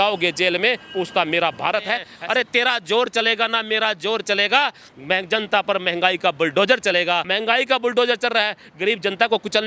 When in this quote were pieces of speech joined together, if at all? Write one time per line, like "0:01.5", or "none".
0:02.0
0:07.3

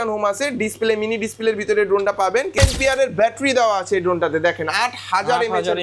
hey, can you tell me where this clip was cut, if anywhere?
0:02.6

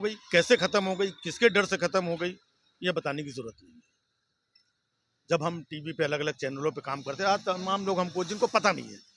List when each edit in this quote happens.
none

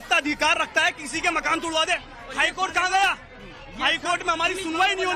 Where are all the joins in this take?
0:02.2

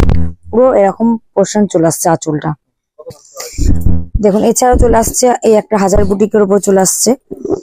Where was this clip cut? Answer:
0:03.1

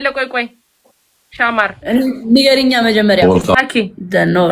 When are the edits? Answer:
0:03.6

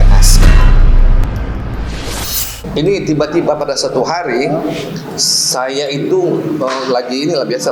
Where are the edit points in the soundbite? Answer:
0:02.6

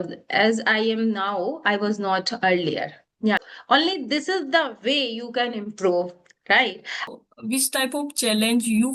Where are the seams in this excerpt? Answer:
0:03.4
0:07.1

